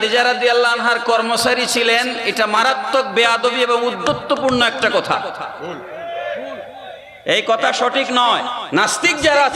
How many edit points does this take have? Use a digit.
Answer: 1